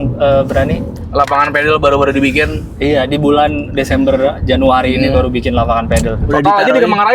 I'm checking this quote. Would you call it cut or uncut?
cut